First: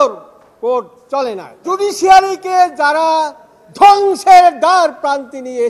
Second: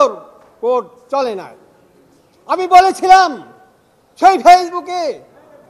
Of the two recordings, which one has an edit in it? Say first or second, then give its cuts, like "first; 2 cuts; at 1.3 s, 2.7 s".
first; 1 cut; at 1.5 s